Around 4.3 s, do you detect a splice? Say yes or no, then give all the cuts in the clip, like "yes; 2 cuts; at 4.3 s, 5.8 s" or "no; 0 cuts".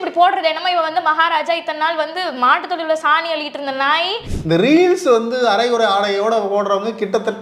yes; 1 cut; at 4.3 s